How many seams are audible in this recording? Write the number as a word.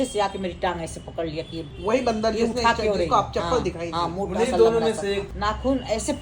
one